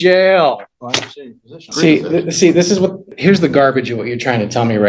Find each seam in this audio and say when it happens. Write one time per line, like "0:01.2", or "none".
0:01.7
0:03.1